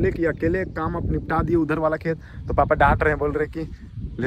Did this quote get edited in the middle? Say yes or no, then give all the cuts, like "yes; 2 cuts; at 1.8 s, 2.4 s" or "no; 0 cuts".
no; 0 cuts